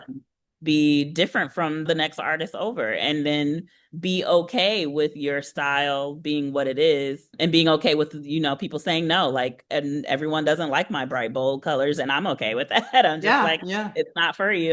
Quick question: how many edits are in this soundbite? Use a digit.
2